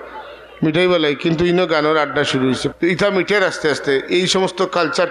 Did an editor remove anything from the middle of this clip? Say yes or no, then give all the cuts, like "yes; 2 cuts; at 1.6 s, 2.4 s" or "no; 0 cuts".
yes; 1 cut; at 2.7 s